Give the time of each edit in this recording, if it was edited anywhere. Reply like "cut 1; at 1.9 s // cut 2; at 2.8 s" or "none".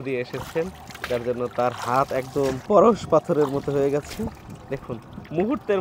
cut 1; at 2.6 s

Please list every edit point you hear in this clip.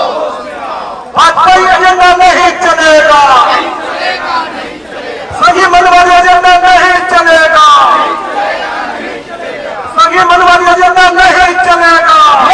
none

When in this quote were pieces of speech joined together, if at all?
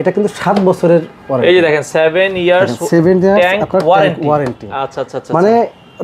none

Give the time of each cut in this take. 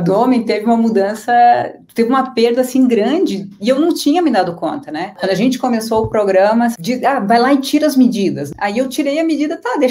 cut 1; at 5.2 s // cut 2; at 6.8 s // cut 3; at 8.5 s

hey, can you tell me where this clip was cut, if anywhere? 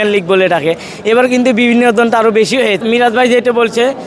cut 1; at 2.8 s

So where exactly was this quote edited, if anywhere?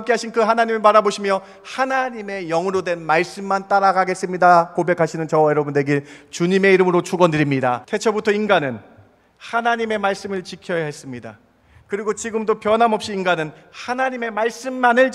cut 1; at 7.8 s

